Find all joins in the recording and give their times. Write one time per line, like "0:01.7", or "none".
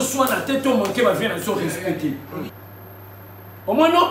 0:02.6